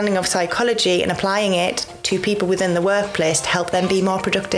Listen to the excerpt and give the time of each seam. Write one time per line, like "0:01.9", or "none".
none